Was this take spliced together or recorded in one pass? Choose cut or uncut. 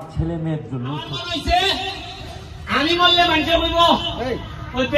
cut